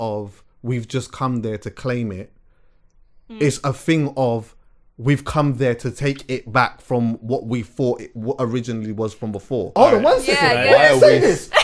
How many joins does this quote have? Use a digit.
1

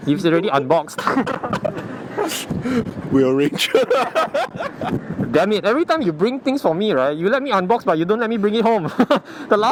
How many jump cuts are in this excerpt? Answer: 0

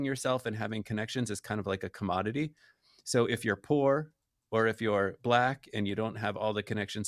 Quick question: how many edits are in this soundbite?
0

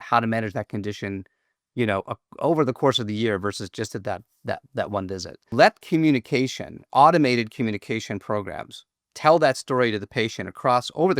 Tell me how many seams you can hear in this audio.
1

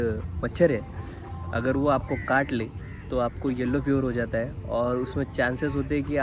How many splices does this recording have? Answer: 0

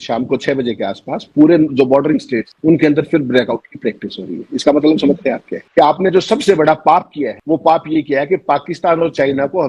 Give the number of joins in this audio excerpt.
1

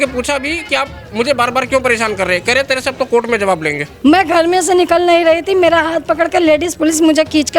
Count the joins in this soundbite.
1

